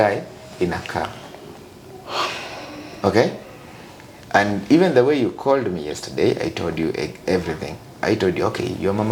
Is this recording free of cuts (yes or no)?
yes